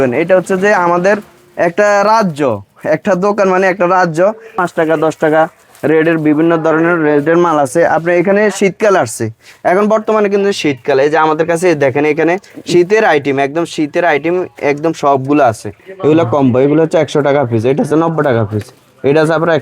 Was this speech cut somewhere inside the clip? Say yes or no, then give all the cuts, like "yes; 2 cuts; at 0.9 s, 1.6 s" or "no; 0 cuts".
yes; 2 cuts; at 4.6 s, 15.7 s